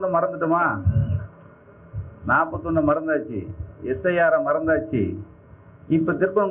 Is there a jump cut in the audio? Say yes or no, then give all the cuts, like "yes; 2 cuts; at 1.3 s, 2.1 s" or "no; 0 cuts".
no; 0 cuts